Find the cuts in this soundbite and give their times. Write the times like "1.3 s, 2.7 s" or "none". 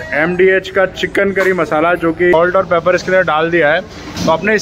2.3 s